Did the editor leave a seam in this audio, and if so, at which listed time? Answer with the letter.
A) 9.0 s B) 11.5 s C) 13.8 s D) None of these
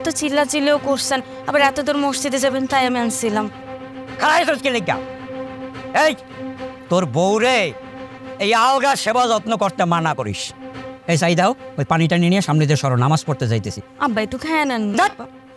C